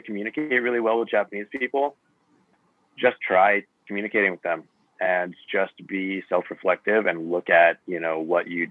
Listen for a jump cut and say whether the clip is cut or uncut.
uncut